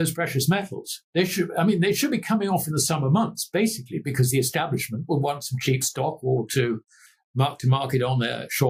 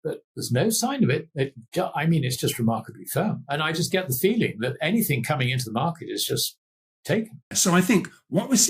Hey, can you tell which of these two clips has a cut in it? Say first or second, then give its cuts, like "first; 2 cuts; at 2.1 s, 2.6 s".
second; 1 cut; at 7.5 s